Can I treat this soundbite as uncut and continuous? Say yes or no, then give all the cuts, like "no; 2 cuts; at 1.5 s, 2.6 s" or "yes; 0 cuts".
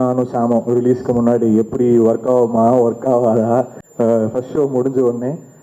no; 1 cut; at 3.8 s